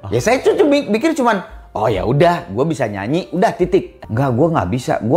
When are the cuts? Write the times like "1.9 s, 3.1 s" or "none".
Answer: 4.0 s

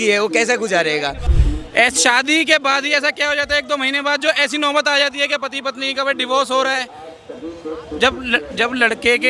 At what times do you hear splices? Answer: 1.3 s

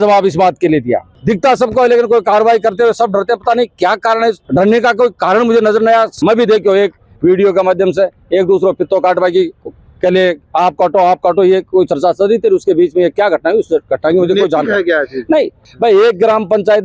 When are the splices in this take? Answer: 1.2 s, 6.1 s, 15.6 s

